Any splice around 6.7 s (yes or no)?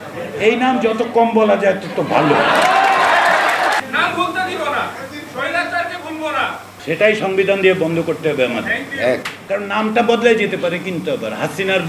yes